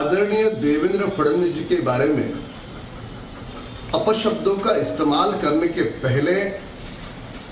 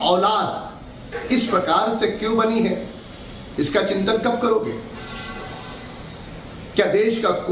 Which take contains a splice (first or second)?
second